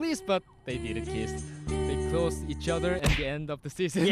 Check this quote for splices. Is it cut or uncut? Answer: uncut